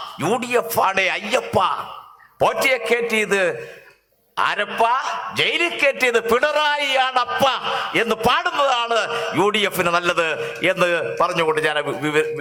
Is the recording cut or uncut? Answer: uncut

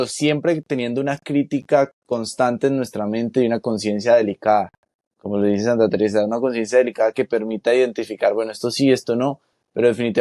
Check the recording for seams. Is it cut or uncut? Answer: cut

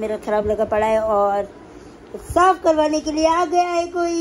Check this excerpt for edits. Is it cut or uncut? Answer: uncut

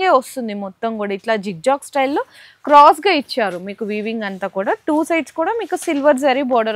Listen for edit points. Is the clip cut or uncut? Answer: uncut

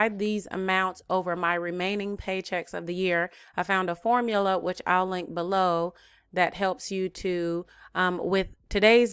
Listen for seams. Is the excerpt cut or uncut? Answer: uncut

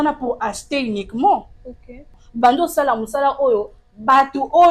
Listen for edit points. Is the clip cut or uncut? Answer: cut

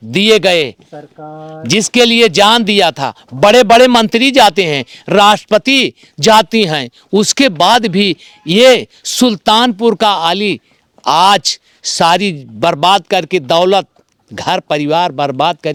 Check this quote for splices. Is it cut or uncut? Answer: uncut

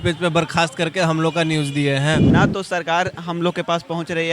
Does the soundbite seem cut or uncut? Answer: cut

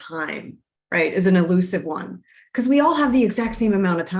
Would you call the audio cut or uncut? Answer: uncut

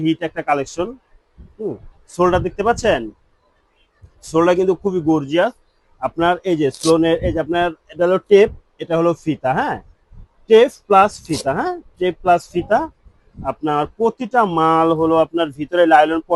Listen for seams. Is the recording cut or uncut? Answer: uncut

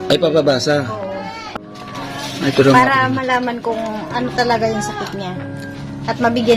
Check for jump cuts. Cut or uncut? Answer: cut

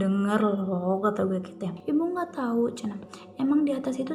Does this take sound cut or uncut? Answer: cut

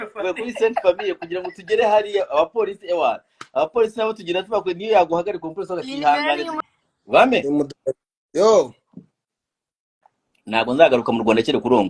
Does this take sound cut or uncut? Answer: cut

